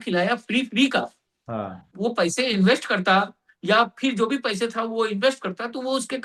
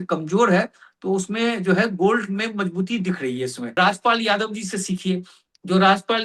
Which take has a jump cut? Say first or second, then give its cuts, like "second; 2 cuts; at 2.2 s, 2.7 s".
second; 1 cut; at 3.6 s